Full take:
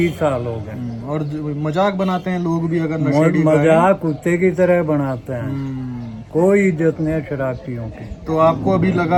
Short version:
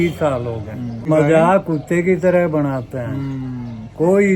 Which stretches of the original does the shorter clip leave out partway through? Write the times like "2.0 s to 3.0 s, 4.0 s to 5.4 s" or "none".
1.1 s to 3.4 s